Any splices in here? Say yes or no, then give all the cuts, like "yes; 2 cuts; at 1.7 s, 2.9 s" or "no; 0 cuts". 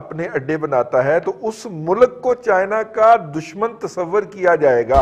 no; 0 cuts